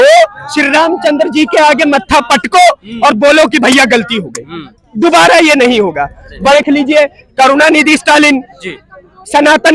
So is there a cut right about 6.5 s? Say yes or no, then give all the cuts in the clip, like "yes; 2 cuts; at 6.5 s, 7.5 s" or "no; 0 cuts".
yes; 1 cut; at 6.5 s